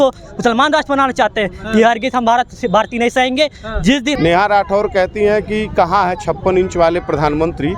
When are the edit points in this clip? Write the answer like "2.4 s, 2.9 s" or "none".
4.1 s